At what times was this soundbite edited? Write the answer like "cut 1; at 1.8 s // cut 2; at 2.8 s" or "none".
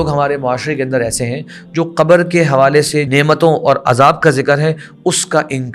cut 1; at 3.1 s

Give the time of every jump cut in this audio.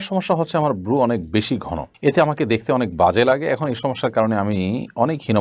none

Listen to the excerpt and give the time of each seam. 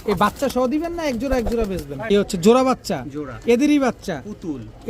cut 1; at 2.1 s

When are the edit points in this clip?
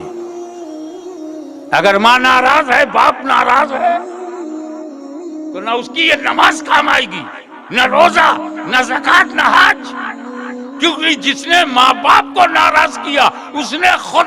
cut 1; at 4.0 s // cut 2; at 5.6 s

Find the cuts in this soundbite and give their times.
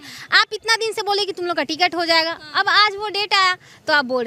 none

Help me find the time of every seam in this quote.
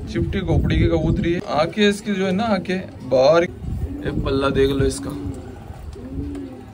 cut 1; at 1.4 s // cut 2; at 3.5 s

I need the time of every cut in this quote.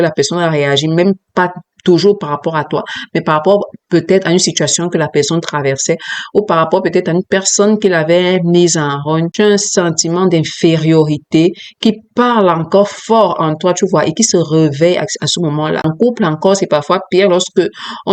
cut 1; at 9.3 s // cut 2; at 15.9 s

